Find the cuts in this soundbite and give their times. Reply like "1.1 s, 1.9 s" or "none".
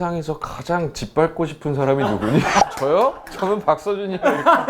2.6 s